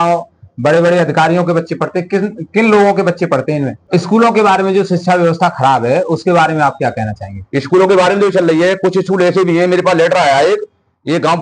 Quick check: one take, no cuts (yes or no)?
no